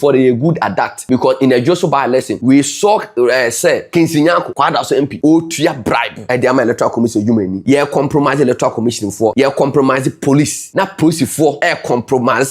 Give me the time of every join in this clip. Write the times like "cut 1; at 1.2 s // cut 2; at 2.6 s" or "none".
cut 1; at 1.0 s // cut 2; at 2.3 s // cut 3; at 3.9 s // cut 4; at 4.6 s // cut 5; at 6.1 s // cut 6; at 7.6 s // cut 7; at 9.3 s // cut 8; at 10.6 s // cut 9; at 11.6 s